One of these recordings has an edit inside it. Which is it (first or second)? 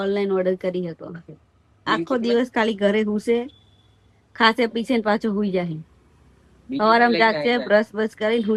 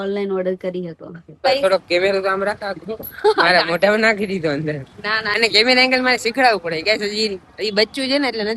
second